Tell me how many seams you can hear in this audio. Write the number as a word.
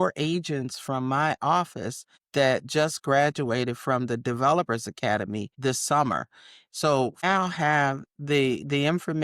two